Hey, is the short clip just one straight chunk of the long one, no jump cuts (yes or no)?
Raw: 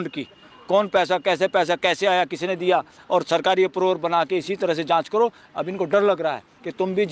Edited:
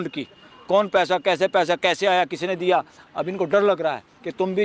no